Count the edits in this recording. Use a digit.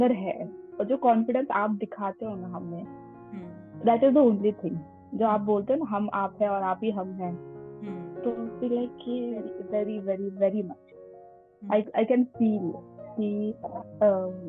1